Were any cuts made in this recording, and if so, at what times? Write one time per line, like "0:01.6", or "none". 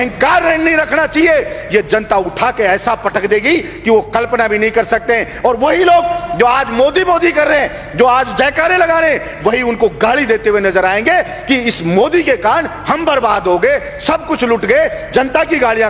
none